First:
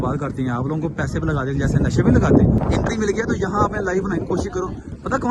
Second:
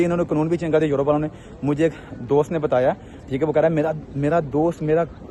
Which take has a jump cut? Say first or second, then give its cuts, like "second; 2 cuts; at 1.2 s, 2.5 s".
first; 1 cut; at 2.6 s